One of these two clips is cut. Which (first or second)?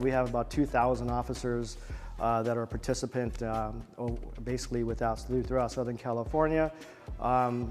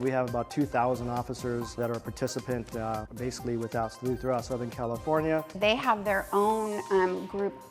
second